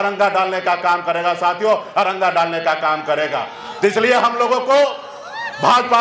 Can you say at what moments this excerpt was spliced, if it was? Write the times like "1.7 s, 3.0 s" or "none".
none